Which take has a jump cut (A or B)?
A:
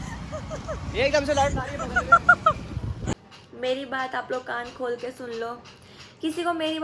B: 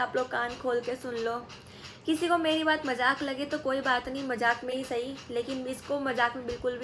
A